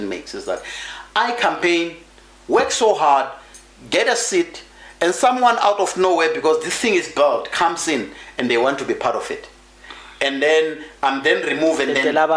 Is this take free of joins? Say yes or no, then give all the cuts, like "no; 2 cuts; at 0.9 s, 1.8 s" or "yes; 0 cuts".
yes; 0 cuts